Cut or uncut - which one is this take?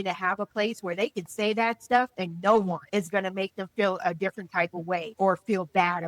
cut